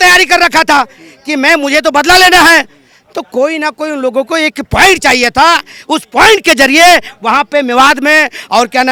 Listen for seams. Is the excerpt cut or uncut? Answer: uncut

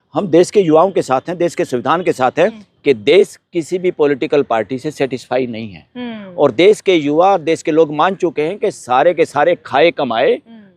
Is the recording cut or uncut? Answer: cut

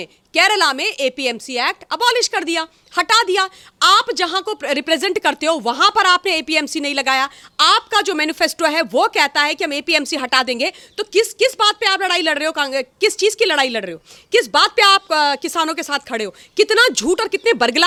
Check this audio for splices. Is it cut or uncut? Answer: uncut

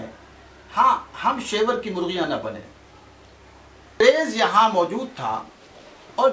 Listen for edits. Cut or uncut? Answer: cut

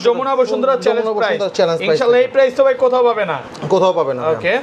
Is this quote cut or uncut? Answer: uncut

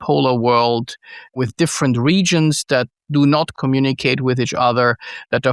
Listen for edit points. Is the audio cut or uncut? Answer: cut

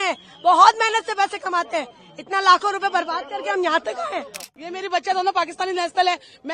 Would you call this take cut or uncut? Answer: cut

